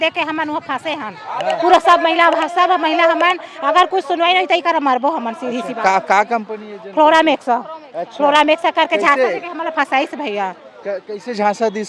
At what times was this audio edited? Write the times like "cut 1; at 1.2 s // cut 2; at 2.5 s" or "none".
none